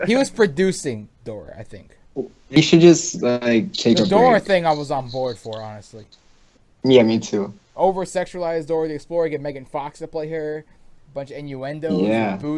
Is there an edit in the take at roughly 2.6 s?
yes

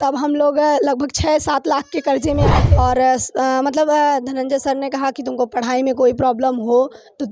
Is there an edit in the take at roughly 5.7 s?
no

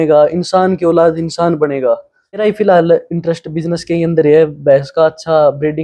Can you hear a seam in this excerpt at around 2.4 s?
yes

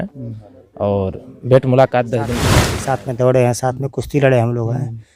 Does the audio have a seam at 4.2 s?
no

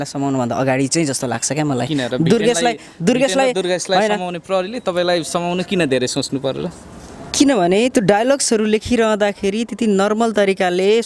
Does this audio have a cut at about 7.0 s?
no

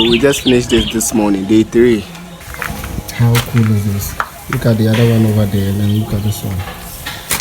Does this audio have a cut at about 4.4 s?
no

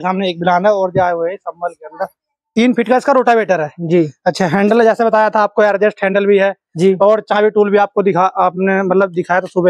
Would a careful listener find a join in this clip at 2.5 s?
yes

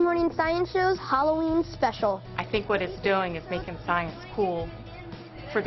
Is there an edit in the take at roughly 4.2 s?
no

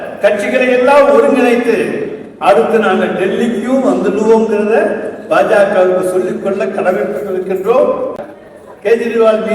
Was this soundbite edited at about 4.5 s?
no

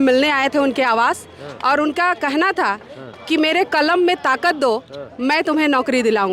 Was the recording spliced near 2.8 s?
no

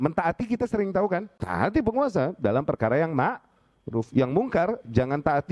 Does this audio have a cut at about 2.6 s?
no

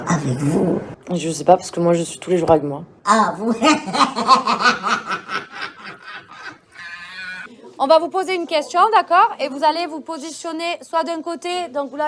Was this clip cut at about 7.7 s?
yes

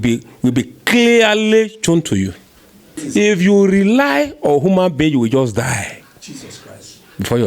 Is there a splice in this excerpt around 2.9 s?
yes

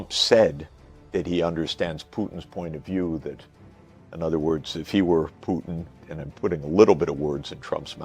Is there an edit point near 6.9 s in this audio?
no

